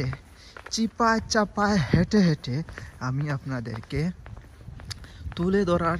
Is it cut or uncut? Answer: uncut